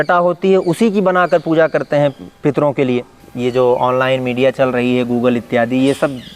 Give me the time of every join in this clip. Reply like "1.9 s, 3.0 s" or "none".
3.2 s